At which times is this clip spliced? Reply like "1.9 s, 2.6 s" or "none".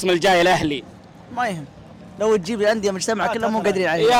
none